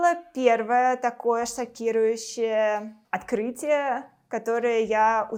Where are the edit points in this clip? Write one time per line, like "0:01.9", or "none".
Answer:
none